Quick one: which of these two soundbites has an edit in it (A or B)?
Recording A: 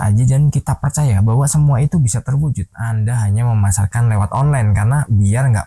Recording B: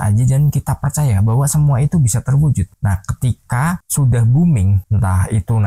A